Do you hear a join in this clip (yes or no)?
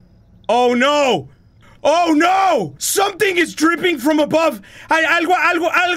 no